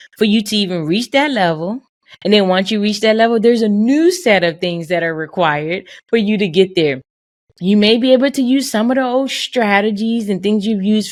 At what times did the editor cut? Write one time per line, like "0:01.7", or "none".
none